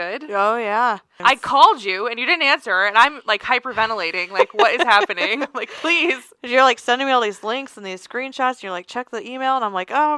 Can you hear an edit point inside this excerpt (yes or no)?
yes